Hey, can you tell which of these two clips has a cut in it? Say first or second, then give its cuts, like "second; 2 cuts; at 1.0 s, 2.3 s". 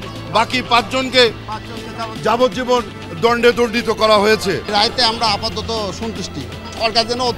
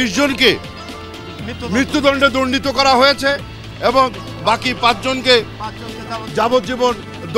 first; 1 cut; at 4.7 s